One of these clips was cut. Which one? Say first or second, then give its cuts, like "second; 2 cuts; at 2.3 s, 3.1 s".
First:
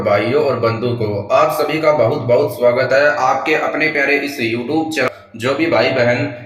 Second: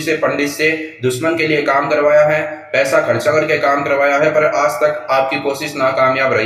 first; 1 cut; at 5.1 s